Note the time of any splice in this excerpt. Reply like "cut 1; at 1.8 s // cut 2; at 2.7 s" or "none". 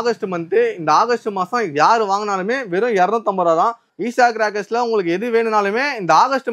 cut 1; at 3.9 s